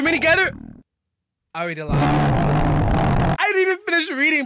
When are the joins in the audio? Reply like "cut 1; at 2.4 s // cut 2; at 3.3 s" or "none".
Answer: none